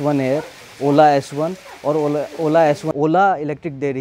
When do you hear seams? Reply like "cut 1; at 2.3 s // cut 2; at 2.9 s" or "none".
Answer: cut 1; at 2.9 s